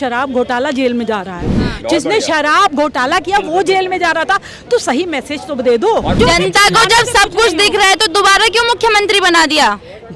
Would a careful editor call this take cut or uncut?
cut